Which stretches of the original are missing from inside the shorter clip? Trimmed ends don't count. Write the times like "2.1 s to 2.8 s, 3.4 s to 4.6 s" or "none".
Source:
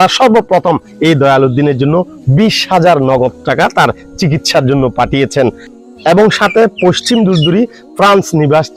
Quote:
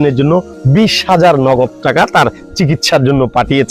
none